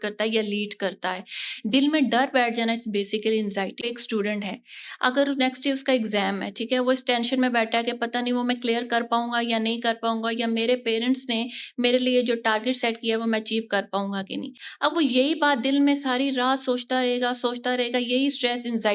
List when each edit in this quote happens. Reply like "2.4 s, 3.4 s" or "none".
3.9 s